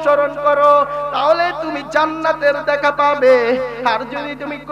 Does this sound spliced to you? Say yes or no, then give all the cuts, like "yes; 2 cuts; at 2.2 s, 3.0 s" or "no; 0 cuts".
no; 0 cuts